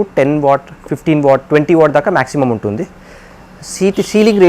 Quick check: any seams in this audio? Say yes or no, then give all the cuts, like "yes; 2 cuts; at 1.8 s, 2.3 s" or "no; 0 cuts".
no; 0 cuts